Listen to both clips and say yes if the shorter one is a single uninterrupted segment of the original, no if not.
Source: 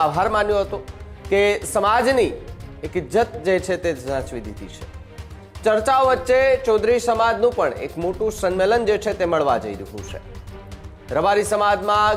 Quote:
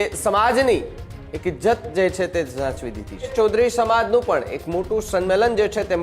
no